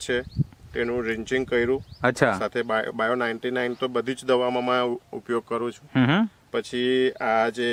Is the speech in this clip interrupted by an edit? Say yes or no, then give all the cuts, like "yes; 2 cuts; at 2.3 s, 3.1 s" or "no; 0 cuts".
no; 0 cuts